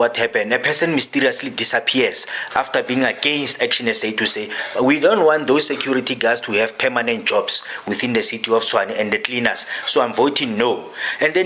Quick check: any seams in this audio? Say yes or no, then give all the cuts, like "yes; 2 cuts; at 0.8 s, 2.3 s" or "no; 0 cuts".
no; 0 cuts